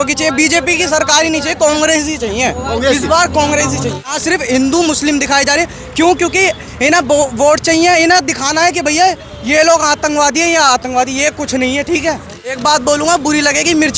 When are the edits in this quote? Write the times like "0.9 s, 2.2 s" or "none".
4.2 s, 12.6 s